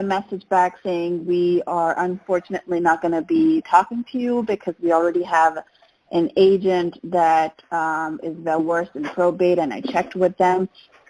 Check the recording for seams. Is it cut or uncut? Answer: uncut